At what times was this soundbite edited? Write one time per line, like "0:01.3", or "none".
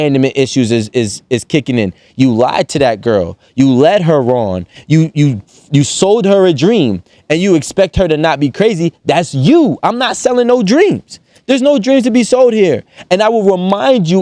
none